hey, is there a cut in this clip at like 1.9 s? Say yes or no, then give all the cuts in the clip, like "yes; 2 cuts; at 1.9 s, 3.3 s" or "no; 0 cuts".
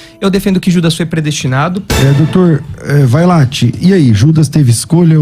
yes; 1 cut; at 1.9 s